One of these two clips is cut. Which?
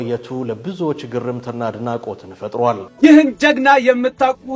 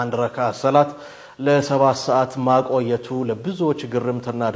first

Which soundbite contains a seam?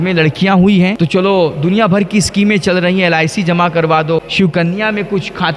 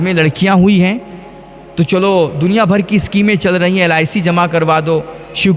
first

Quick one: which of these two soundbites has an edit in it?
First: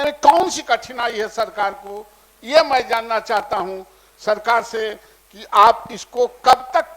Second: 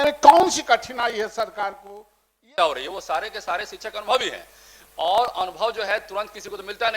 second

